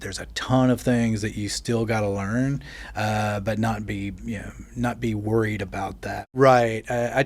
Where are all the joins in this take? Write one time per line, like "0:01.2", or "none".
0:06.2